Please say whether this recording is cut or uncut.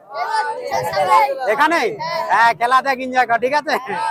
uncut